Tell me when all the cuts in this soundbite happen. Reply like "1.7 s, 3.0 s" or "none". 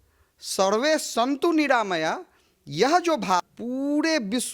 3.4 s